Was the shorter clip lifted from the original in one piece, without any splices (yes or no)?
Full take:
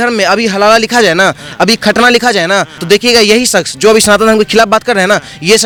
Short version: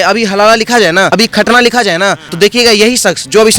no